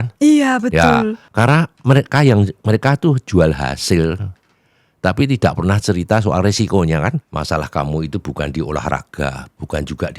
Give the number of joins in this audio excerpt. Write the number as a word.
two